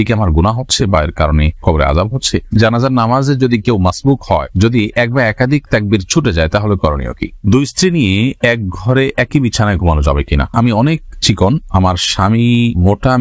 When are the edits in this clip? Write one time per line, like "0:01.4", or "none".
0:02.6
0:07.3
0:10.5